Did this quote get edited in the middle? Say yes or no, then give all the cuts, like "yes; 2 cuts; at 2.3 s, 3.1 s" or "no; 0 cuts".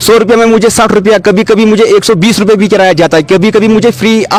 no; 0 cuts